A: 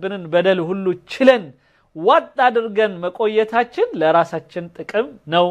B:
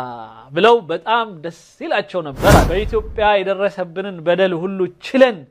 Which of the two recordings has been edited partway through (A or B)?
B